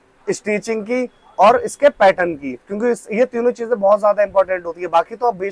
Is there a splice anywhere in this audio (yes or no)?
no